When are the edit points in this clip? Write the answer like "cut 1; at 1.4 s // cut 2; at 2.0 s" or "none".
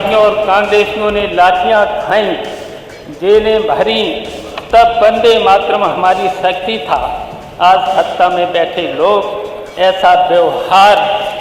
none